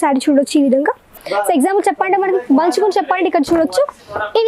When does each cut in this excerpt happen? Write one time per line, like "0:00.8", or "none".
0:01.2